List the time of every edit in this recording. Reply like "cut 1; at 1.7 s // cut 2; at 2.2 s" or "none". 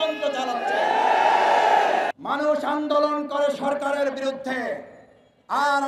cut 1; at 2.1 s